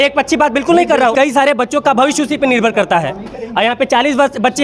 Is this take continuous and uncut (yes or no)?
no